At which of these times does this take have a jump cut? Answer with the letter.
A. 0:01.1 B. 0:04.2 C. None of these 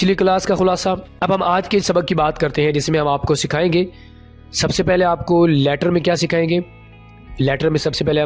A